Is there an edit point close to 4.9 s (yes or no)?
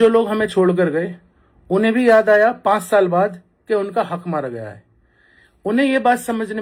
no